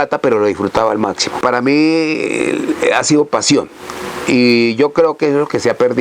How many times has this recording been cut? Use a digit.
1